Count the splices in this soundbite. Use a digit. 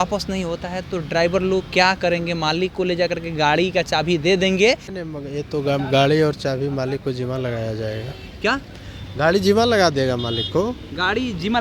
1